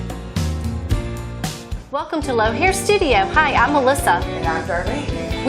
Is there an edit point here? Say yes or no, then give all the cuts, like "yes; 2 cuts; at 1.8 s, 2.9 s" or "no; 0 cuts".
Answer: yes; 1 cut; at 1.8 s